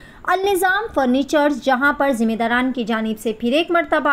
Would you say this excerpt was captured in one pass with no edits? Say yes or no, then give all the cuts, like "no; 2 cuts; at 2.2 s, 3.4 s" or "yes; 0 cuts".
yes; 0 cuts